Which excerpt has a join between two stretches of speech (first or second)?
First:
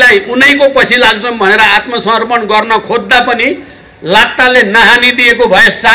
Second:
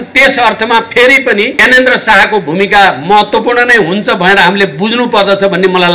second